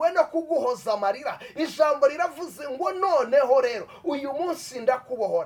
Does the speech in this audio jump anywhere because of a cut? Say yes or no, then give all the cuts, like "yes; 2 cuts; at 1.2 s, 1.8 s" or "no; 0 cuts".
no; 0 cuts